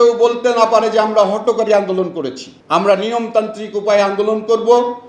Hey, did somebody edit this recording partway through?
no; 0 cuts

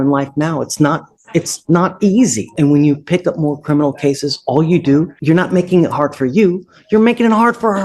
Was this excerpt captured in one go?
no; 2 cuts; at 2.4 s, 5.1 s

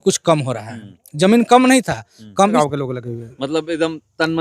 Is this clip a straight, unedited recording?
no; 1 cut; at 2.6 s

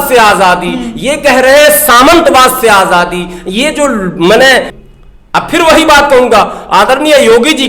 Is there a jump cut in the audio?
yes; 1 cut; at 4.7 s

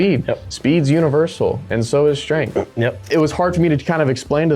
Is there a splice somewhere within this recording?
yes; 1 cut; at 3.0 s

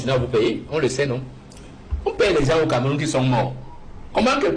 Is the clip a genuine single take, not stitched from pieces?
yes; 0 cuts

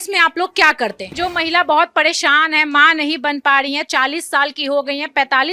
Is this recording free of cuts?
no; 1 cut; at 1.1 s

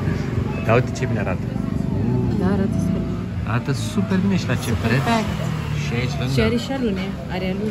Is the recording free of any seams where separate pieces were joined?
yes; 0 cuts

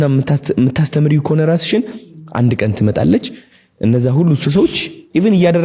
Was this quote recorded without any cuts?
yes; 0 cuts

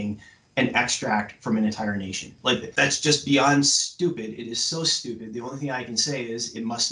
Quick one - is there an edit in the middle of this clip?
yes; 1 cut; at 2.7 s

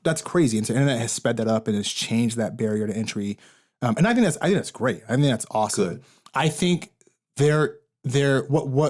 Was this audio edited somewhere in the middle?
no; 0 cuts

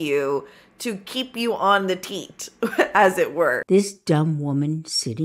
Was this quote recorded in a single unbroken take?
no; 1 cut; at 3.6 s

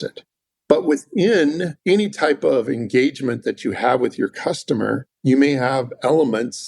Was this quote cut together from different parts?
yes; 2 cuts; at 1.7 s, 5.1 s

